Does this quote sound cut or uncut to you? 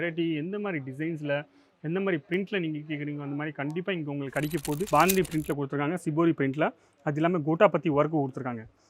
cut